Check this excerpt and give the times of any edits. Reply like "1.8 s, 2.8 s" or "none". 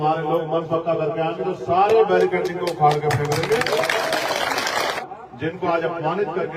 5.0 s